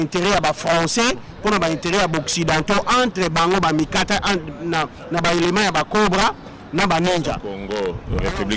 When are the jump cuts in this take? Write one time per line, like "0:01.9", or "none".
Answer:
0:07.5